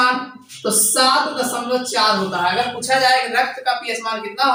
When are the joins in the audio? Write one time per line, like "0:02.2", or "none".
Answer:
none